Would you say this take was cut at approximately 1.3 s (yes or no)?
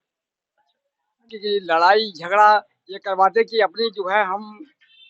yes